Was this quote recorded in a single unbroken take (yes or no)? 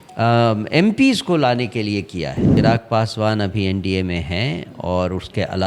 no